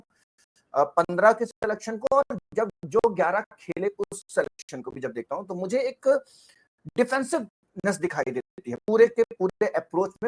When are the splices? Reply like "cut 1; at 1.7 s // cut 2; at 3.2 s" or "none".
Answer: none